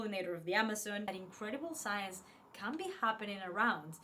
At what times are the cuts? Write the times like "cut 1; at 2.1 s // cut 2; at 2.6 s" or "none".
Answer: cut 1; at 1.2 s